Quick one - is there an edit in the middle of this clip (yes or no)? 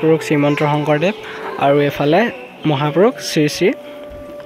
no